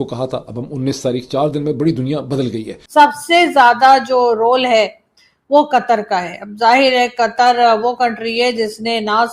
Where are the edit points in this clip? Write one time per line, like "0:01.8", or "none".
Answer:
0:02.7